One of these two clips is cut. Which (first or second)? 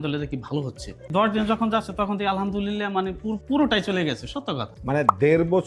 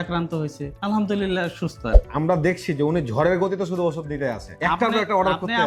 first